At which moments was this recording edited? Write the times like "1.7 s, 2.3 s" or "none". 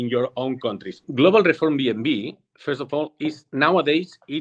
1.0 s